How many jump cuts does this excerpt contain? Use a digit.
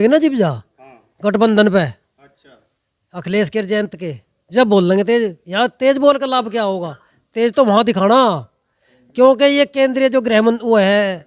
0